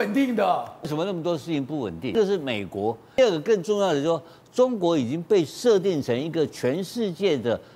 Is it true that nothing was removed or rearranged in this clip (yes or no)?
no